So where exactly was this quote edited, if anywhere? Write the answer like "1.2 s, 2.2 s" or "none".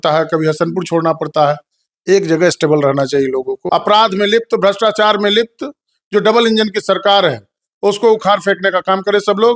3.6 s